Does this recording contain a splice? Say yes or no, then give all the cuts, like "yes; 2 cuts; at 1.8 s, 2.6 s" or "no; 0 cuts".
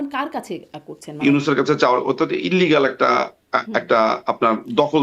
yes; 1 cut; at 1.2 s